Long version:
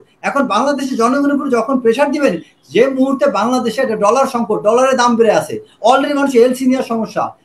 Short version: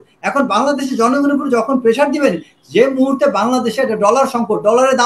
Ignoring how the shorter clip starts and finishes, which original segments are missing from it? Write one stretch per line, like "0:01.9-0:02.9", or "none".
none